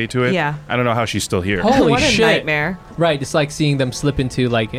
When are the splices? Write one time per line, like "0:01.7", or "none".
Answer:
0:02.8